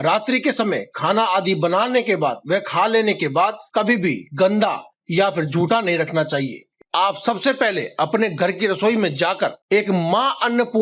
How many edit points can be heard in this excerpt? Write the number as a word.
one